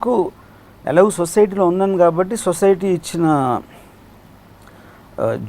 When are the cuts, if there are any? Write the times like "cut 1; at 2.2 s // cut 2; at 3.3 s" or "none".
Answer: none